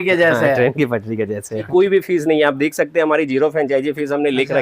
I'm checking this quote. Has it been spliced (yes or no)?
yes